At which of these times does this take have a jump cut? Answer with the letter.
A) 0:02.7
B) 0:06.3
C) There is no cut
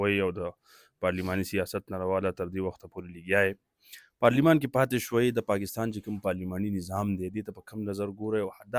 C